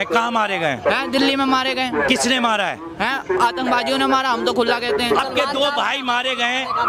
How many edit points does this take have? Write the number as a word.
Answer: one